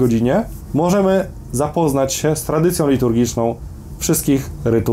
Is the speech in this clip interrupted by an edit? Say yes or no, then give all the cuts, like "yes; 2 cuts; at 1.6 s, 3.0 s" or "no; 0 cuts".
no; 0 cuts